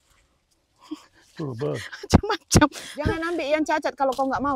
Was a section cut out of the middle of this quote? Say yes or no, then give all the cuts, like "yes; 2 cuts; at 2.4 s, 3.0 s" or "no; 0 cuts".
yes; 1 cut; at 3.2 s